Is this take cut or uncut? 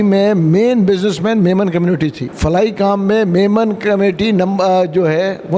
cut